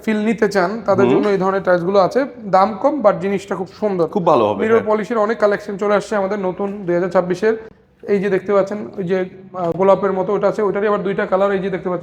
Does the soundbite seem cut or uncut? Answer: uncut